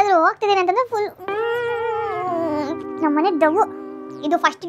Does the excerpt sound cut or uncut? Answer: cut